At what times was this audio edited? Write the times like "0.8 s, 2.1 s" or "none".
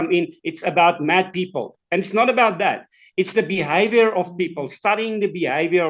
none